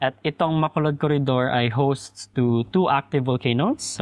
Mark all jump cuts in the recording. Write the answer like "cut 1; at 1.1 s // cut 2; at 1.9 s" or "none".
none

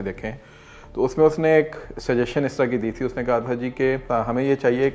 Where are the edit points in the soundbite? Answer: cut 1; at 4.1 s

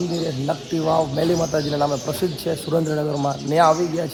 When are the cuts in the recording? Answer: none

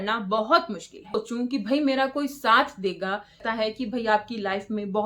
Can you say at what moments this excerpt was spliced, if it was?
cut 1; at 1.2 s // cut 2; at 3.4 s

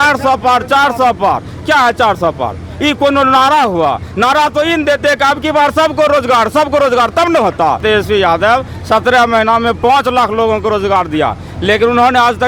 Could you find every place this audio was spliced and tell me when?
cut 1; at 7.8 s

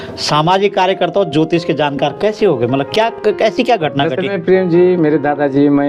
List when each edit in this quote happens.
none

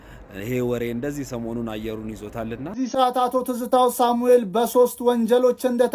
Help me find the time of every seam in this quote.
cut 1; at 2.8 s

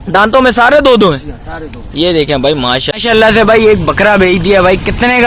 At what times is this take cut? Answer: cut 1; at 2.9 s

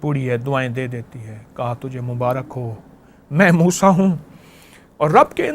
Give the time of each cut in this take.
none

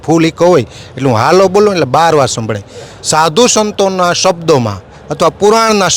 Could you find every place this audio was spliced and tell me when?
none

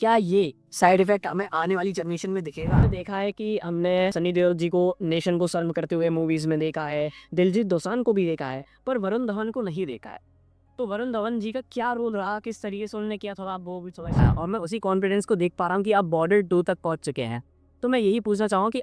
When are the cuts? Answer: cut 1; at 2.9 s // cut 2; at 14.2 s

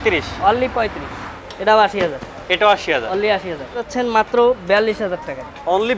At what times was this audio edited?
cut 1; at 1.3 s // cut 2; at 3.9 s

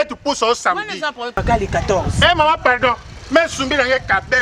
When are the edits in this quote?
cut 1; at 1.4 s

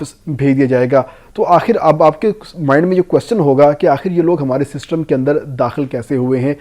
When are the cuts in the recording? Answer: none

